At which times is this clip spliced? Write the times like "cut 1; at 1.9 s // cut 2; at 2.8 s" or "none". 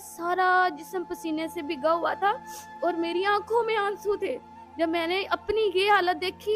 none